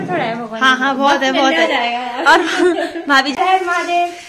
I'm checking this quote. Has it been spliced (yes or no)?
yes